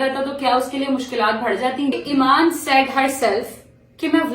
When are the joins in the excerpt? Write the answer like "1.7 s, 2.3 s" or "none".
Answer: 1.9 s